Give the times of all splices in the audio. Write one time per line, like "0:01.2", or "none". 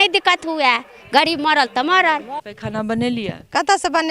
0:02.4